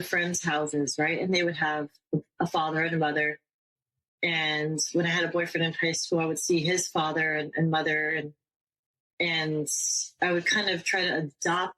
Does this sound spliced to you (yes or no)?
no